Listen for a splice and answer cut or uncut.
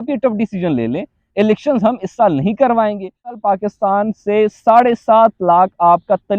cut